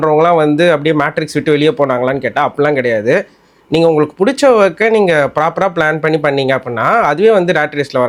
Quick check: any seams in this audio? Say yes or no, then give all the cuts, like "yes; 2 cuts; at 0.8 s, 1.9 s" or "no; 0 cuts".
no; 0 cuts